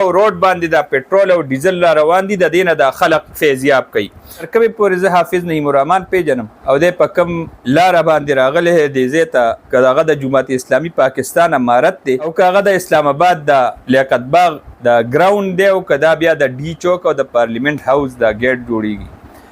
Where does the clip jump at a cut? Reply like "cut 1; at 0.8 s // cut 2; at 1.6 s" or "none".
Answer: cut 1; at 4.5 s // cut 2; at 6.5 s // cut 3; at 7.6 s // cut 4; at 9.7 s // cut 5; at 12.3 s // cut 6; at 13.8 s // cut 7; at 14.7 s